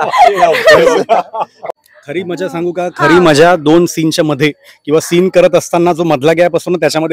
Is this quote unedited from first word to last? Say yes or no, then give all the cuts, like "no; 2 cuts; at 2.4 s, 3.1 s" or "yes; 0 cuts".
no; 1 cut; at 1.5 s